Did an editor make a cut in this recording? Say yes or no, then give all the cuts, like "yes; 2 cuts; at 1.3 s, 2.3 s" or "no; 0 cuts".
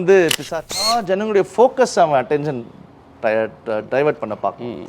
yes; 1 cut; at 1.0 s